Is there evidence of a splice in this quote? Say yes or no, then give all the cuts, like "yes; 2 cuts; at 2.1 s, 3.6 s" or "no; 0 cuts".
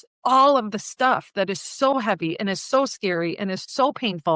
no; 0 cuts